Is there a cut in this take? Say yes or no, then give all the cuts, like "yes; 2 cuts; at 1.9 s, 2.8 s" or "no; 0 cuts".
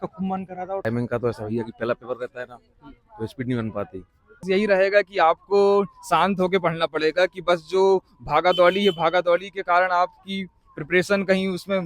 yes; 2 cuts; at 0.8 s, 4.5 s